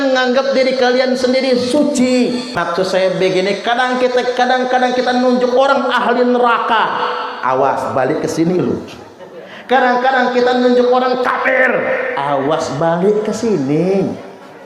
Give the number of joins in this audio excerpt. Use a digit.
1